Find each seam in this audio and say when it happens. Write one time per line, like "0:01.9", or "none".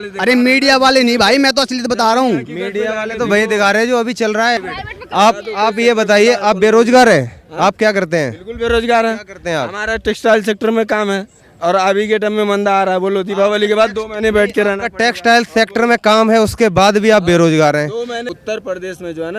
0:04.6
0:18.2